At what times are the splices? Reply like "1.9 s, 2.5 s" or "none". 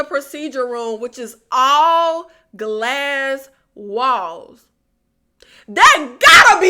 none